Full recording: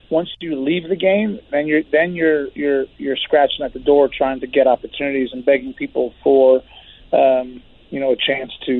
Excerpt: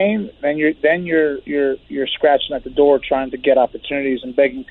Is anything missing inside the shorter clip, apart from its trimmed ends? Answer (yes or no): no